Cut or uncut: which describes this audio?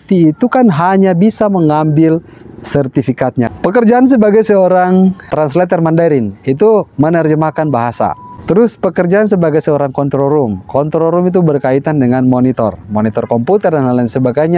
cut